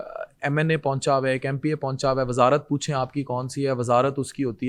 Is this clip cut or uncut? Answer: uncut